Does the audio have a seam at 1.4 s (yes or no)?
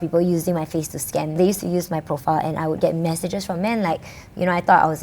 yes